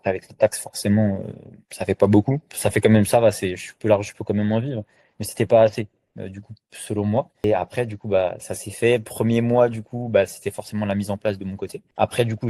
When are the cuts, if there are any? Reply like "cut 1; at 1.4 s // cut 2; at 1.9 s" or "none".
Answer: none